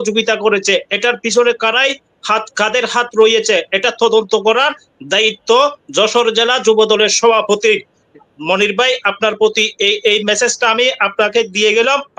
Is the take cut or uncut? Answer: uncut